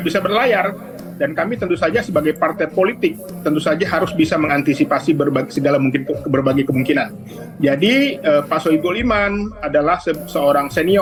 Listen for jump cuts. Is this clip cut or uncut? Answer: uncut